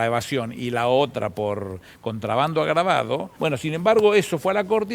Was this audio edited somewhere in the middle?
yes; 1 cut; at 3.3 s

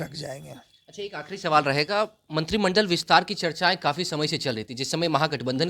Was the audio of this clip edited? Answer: no; 0 cuts

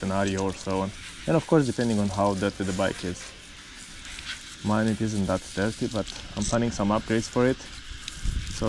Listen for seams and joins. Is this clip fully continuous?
yes; 0 cuts

